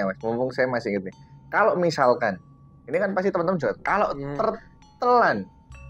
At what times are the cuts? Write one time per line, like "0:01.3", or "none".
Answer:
none